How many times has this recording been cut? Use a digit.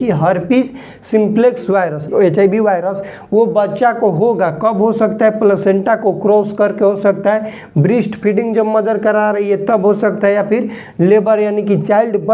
1